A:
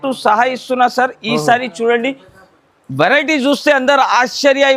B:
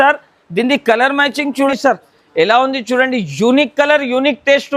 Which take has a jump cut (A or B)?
B